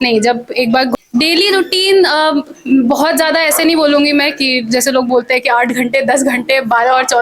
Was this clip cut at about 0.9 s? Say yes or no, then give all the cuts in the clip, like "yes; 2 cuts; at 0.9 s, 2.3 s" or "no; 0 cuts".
yes; 1 cut; at 0.9 s